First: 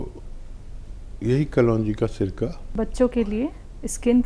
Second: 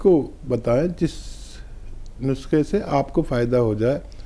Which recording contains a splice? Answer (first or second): first